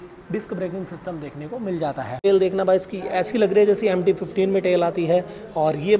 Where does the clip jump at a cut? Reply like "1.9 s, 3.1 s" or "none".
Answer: 2.2 s